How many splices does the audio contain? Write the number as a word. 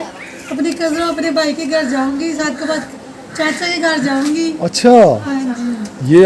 zero